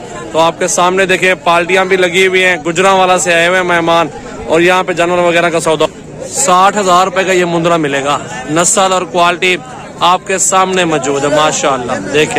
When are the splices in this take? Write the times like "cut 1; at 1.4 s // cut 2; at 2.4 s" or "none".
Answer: none